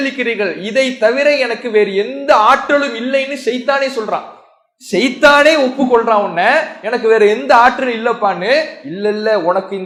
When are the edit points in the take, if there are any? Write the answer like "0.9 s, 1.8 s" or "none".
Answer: none